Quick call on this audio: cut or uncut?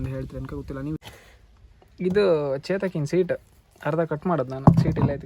cut